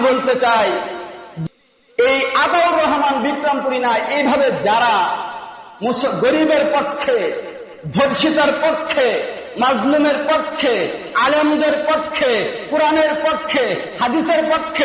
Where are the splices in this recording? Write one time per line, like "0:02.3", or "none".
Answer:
0:01.2